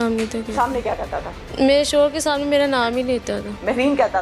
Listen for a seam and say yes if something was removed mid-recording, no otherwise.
yes